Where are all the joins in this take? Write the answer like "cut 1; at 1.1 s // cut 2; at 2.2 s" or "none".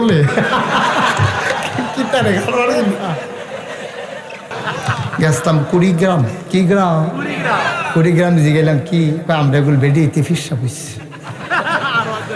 cut 1; at 4.5 s